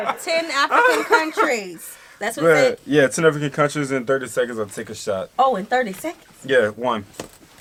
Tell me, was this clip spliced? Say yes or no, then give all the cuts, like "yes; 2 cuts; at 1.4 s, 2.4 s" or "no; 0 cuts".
no; 0 cuts